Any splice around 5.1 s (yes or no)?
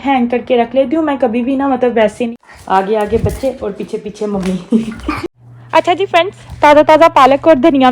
yes